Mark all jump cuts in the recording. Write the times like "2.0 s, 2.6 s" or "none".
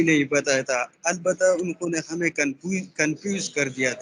none